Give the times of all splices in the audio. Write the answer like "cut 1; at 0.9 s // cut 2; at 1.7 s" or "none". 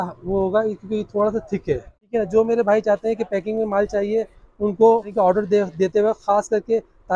cut 1; at 2.0 s // cut 2; at 5.1 s